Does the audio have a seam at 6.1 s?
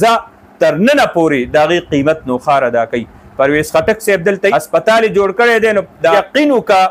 yes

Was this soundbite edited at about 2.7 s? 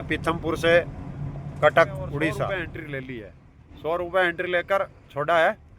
yes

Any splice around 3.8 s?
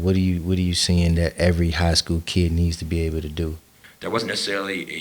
yes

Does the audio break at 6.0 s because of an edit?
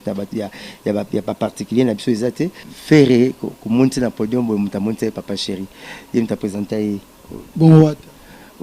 no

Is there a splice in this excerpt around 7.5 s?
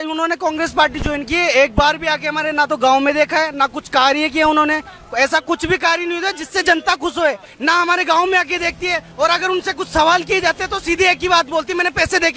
yes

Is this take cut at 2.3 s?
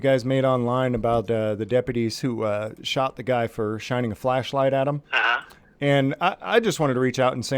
no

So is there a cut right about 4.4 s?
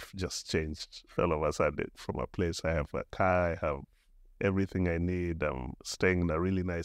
no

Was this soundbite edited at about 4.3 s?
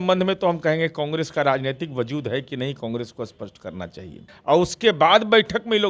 yes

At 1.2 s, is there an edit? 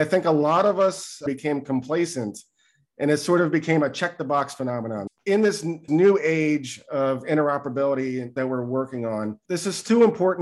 yes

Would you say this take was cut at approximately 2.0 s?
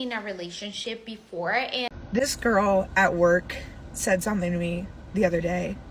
yes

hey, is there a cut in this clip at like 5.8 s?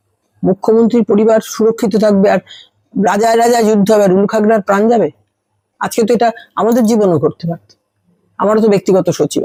no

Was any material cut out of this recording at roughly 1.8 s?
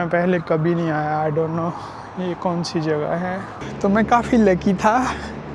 no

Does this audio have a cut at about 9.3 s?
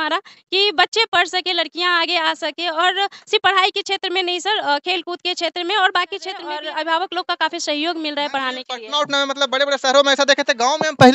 no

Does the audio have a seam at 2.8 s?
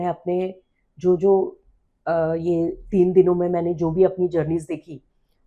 no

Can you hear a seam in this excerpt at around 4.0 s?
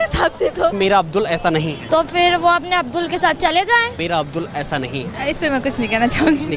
yes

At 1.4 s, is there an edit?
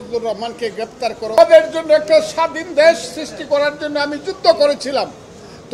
yes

